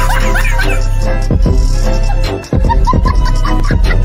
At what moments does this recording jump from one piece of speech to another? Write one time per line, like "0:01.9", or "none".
none